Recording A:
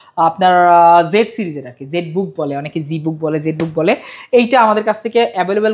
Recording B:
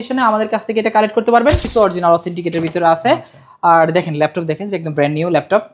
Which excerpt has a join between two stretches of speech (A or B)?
B